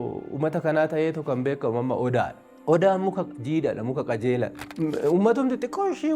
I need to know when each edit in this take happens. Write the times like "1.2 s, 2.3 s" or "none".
4.6 s